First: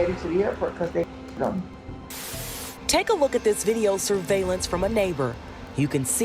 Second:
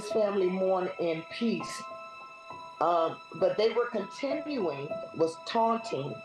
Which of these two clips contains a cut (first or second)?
first